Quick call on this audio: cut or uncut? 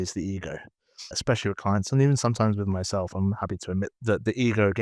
cut